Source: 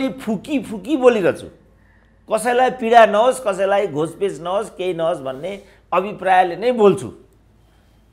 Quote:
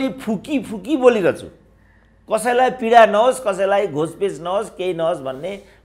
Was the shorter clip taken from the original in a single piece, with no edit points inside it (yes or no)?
yes